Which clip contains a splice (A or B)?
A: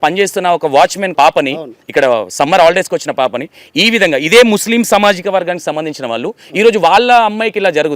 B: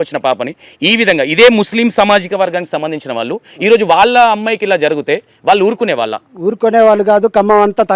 A